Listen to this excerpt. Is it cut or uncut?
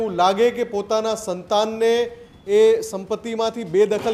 uncut